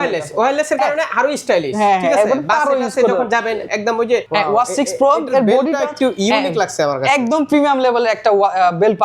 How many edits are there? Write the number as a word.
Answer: one